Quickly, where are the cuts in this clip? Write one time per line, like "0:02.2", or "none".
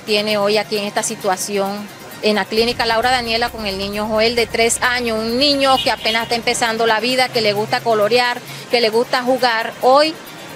none

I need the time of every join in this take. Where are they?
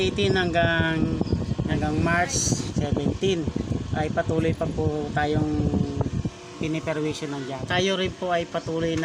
0:01.7
0:02.7
0:07.6

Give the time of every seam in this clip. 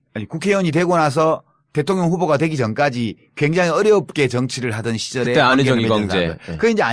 none

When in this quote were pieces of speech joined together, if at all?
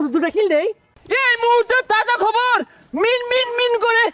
0:01.0

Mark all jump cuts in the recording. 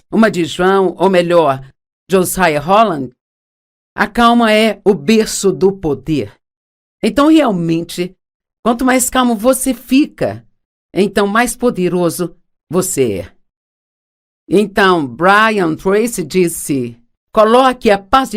0:15.5

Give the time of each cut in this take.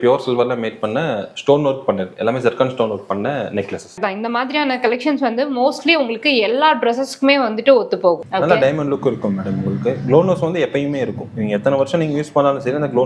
0:03.9
0:08.2

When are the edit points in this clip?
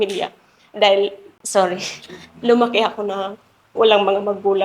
0:01.3

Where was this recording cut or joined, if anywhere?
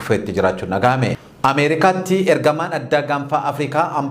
0:01.2

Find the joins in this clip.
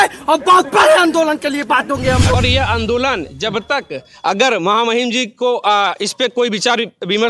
0:02.3

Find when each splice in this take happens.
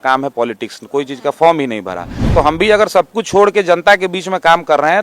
0:02.3

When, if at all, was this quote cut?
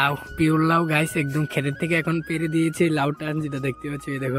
none

